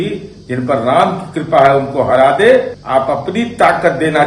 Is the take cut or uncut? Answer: cut